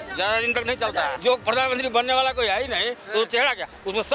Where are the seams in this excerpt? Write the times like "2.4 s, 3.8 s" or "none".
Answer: 1.2 s